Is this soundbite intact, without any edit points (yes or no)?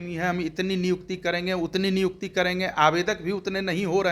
yes